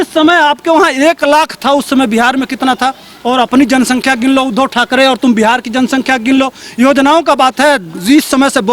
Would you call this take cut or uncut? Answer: uncut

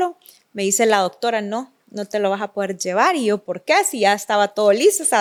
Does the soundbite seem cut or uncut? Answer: uncut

